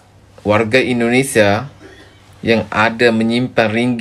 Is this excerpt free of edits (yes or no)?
yes